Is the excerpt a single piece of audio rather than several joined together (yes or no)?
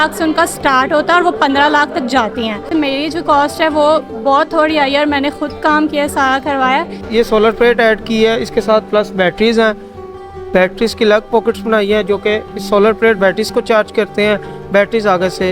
no